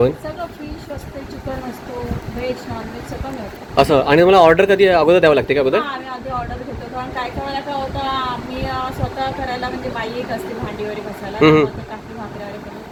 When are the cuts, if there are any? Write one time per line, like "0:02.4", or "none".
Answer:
none